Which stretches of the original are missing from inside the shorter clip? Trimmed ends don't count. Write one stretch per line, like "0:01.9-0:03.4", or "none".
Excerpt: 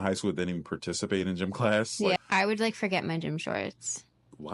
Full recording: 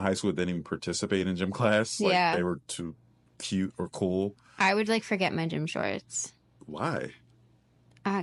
0:02.2-0:04.4